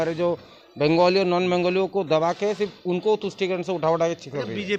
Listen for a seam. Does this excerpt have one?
no; 0 cuts

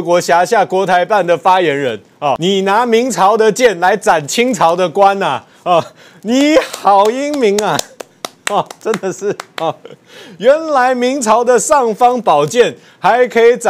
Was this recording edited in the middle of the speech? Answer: yes; 1 cut; at 2.4 s

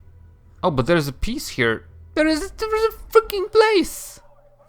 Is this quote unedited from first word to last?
no; 1 cut; at 1.9 s

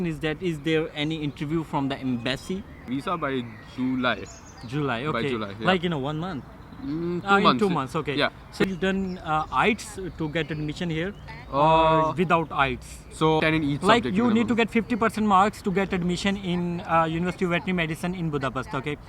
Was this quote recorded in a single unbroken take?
no; 3 cuts; at 2.9 s, 8.6 s, 13.4 s

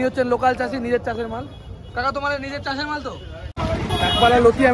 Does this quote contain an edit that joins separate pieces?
yes; 1 cut; at 3.6 s

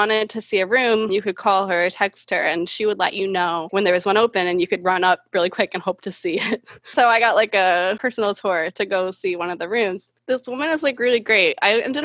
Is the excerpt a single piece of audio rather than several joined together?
no; 4 cuts; at 1.1 s, 3.7 s, 6.9 s, 10.1 s

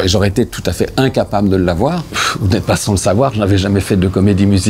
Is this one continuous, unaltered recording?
no; 1 cut; at 2.1 s

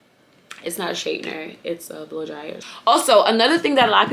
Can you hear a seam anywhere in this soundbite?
yes; 1 cut; at 2.6 s

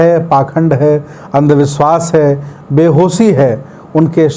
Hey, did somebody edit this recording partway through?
no; 0 cuts

